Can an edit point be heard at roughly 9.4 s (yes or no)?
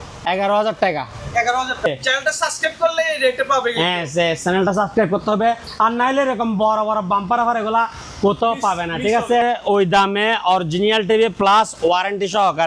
yes